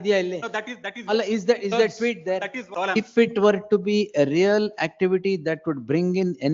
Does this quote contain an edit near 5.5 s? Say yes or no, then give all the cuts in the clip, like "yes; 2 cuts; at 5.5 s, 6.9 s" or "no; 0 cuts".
no; 1 cut; at 2.6 s